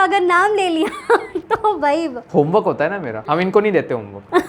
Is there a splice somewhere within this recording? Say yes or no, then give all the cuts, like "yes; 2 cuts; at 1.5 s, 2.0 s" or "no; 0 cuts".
no; 0 cuts